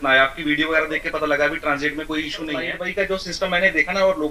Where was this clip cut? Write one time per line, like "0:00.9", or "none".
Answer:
0:02.8